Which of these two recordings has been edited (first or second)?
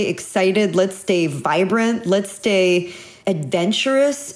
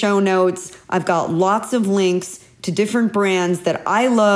first